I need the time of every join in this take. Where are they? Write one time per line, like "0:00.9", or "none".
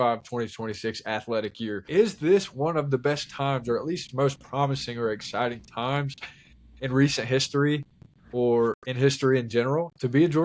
0:01.8